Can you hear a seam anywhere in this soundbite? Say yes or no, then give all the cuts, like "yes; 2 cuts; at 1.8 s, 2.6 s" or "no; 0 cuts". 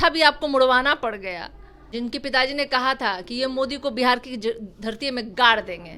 yes; 1 cut; at 1.9 s